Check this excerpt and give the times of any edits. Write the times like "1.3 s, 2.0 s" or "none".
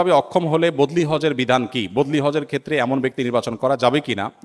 none